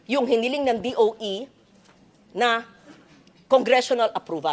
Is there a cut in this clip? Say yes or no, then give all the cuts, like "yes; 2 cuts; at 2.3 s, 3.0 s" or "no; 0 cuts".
no; 0 cuts